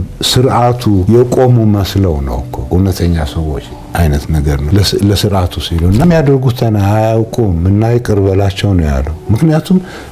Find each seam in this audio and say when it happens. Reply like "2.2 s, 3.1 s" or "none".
1.0 s, 2.5 s, 4.6 s, 6.0 s